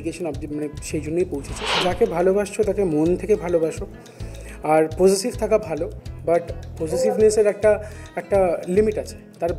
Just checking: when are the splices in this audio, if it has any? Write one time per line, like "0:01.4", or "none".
0:01.7